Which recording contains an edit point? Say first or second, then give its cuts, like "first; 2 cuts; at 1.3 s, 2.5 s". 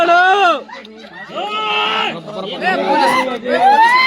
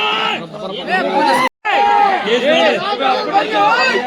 second; 1 cut; at 1.5 s